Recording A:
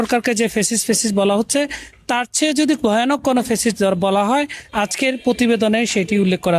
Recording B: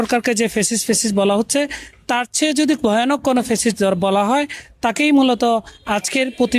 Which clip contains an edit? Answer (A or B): A